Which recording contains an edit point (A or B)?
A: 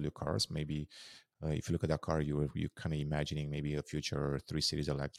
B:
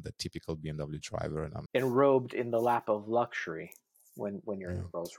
B